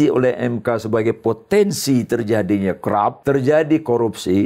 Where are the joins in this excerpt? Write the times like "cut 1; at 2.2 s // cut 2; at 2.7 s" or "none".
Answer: cut 1; at 3.2 s